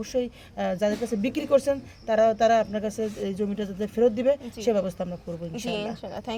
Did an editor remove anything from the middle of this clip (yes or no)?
no